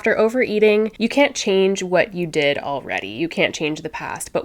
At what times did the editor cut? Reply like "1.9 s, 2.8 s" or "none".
1.0 s